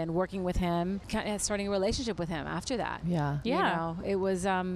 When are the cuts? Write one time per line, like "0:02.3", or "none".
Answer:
0:01.1

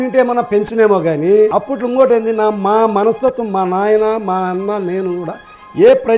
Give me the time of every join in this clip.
0:01.5

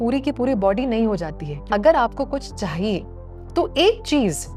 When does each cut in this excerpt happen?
0:01.6
0:03.3

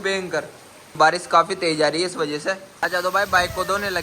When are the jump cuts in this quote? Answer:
0:00.9
0:02.7

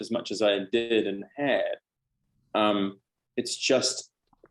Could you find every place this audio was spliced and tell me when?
none

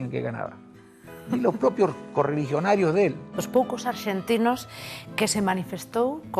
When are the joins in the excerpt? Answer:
0:03.4

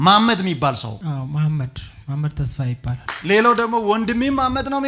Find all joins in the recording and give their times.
0:00.9
0:03.1

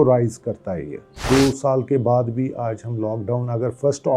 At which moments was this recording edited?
0:01.1

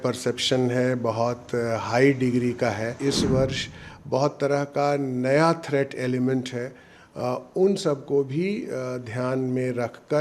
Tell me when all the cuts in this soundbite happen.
0:03.0

